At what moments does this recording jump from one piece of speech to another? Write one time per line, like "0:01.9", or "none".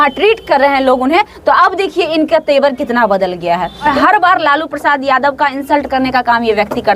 0:03.8